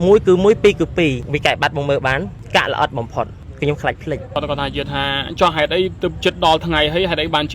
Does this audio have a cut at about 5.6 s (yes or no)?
no